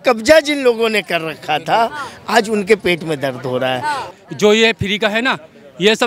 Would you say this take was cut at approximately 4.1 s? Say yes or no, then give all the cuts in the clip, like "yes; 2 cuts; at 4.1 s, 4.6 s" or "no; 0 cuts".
yes; 1 cut; at 4.1 s